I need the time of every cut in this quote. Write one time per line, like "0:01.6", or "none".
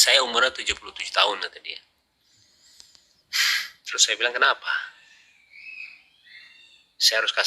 none